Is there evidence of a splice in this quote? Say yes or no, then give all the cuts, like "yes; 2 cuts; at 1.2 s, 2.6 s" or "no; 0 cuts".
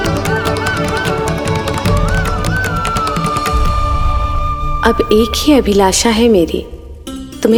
no; 0 cuts